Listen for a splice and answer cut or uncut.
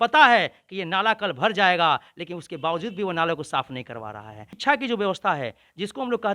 cut